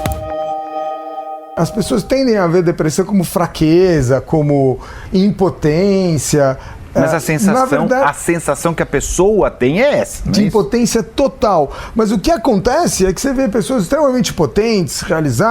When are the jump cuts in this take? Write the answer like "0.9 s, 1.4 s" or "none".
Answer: 1.4 s